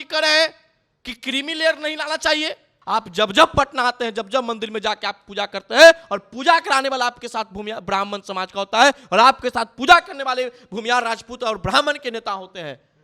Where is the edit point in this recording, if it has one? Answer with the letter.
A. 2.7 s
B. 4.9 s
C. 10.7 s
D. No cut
A